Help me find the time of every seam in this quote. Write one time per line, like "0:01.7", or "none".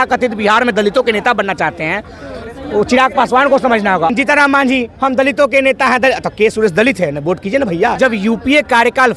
0:04.1
0:07.9